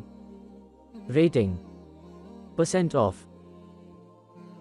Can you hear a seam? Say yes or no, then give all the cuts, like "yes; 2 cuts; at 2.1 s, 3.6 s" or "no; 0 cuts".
yes; 1 cut; at 3.1 s